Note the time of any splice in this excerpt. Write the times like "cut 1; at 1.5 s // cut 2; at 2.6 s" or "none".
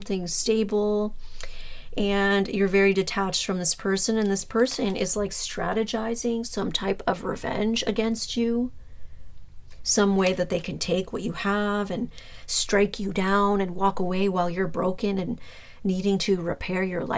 none